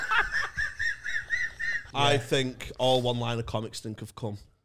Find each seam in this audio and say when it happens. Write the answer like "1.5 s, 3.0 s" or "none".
1.8 s